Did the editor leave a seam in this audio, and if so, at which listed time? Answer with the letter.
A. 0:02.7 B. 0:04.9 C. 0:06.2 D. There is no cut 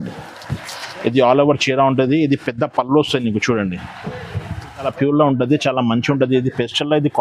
B